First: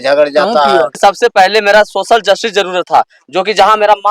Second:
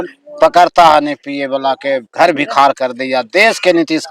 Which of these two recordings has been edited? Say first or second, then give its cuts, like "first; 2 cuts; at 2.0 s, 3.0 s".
first; 1 cut; at 1.0 s